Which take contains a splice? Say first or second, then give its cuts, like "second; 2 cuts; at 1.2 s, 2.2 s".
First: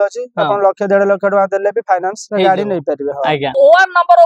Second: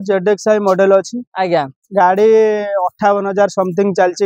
first; 2 cuts; at 2.2 s, 3.5 s